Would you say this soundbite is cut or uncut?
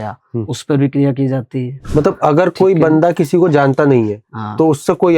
cut